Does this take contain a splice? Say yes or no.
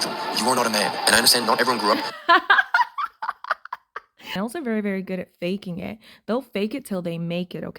yes